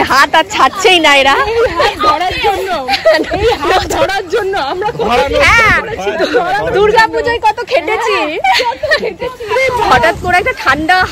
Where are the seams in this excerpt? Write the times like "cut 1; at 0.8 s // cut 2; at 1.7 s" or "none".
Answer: none